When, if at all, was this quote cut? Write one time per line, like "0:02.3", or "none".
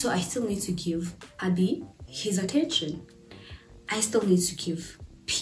0:01.2